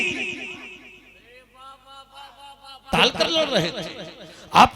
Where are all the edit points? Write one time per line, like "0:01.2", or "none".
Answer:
0:02.9